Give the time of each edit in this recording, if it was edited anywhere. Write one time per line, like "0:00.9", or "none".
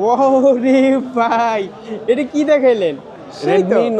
none

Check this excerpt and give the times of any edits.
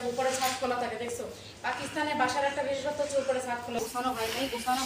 0:03.8

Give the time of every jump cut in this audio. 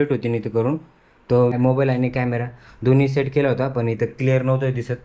0:01.5

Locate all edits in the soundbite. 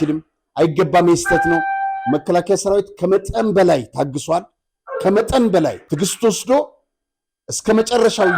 0:05.8

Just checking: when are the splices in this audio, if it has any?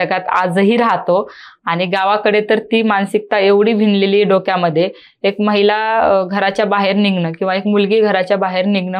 none

